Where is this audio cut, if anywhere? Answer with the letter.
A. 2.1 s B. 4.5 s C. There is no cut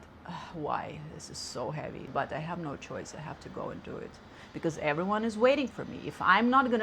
A